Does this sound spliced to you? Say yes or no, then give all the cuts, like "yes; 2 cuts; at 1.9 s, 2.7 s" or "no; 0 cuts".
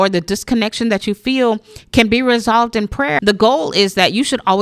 yes; 1 cut; at 3.2 s